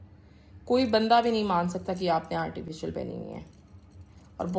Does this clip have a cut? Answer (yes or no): no